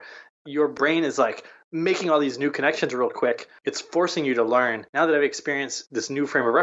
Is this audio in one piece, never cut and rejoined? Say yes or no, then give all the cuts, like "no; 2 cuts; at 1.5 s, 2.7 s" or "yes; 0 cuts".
no; 3 cuts; at 0.8 s, 3.5 s, 4.8 s